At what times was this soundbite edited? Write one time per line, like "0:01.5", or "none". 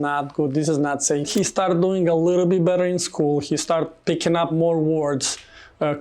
0:01.3
0:04.5

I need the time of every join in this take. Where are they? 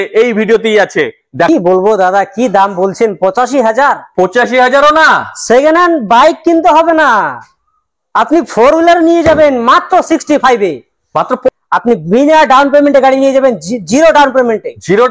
0:01.5
0:11.5

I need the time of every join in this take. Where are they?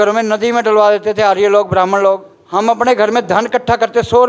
0:02.4

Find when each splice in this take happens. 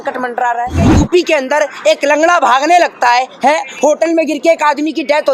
0:00.9

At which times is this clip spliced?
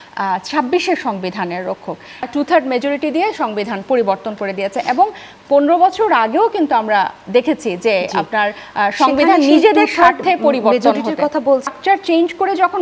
0:02.3
0:11.8

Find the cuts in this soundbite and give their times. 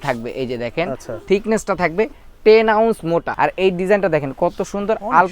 0:01.1
0:03.3

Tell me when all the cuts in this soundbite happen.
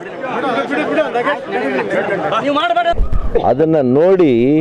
0:03.0

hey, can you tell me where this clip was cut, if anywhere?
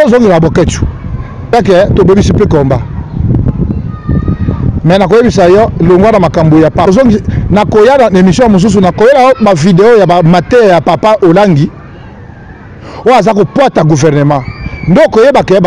0:01.5
0:06.9

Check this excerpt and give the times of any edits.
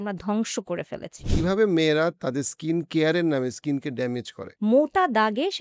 0:01.2
0:04.4

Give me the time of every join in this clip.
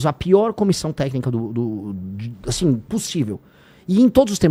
none

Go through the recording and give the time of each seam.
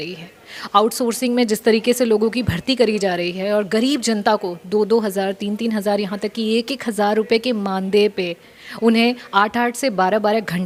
none

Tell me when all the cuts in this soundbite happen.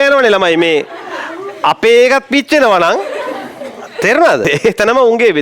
0:04.4

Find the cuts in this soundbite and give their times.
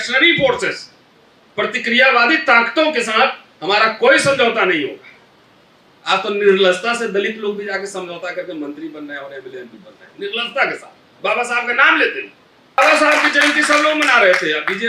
0:12.8

